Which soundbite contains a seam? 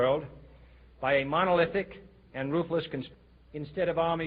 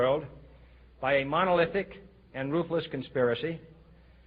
second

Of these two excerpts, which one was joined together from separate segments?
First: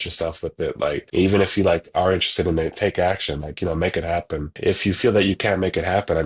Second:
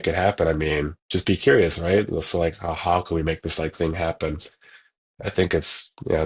first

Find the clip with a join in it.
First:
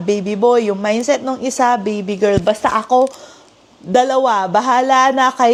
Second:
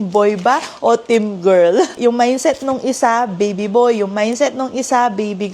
second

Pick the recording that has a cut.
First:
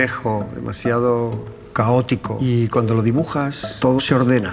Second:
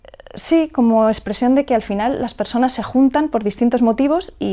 first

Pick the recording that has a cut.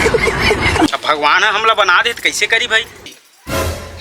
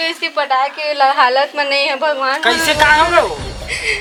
first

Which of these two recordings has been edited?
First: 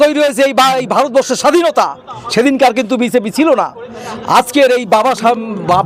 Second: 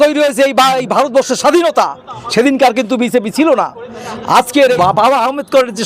second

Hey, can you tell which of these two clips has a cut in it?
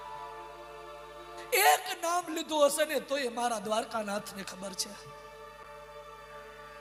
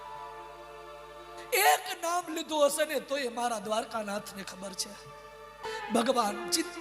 second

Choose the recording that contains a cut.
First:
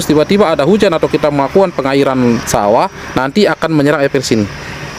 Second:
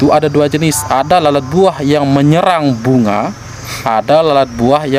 first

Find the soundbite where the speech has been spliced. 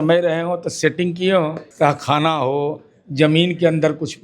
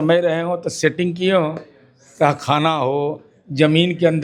first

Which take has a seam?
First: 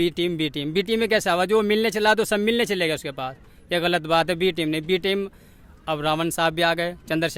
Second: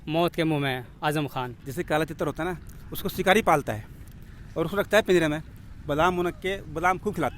second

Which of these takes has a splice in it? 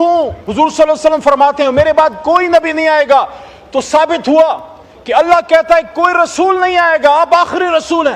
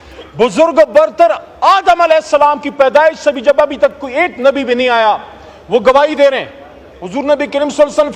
second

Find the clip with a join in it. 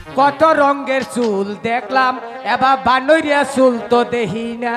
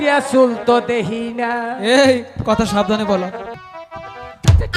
second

